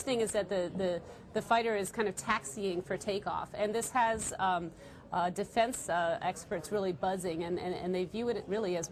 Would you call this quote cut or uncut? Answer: uncut